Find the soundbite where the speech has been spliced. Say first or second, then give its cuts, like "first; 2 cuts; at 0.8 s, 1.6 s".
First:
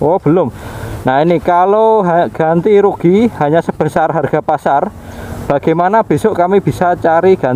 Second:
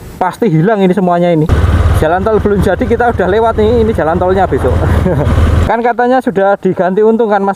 second; 2 cuts; at 1.5 s, 5.6 s